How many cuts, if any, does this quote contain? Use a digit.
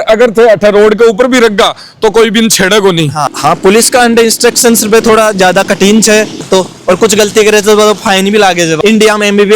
3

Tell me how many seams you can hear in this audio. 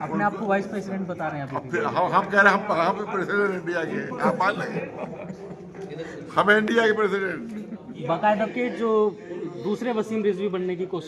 1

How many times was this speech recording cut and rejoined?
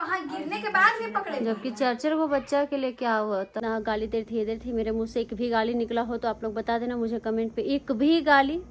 1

